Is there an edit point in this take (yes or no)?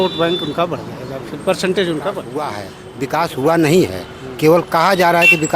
yes